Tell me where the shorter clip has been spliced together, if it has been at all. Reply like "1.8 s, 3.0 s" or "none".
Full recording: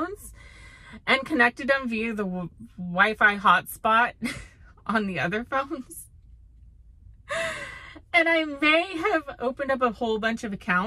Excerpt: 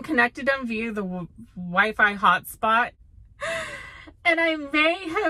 2.9 s